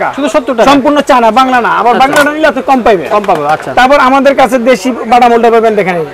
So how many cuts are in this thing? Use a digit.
0